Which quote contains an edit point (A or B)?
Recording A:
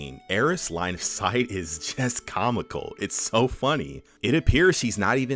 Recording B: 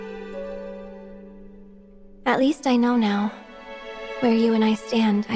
B